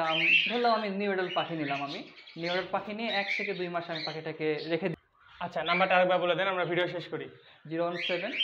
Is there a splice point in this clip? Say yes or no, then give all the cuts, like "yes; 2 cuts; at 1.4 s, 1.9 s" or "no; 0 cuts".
yes; 1 cut; at 4.9 s